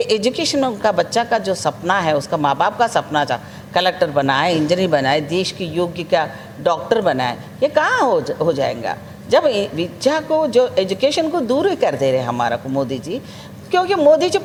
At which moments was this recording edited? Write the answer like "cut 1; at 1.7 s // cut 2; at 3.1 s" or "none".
none